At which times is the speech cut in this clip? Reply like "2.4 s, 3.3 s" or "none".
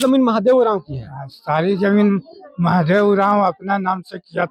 none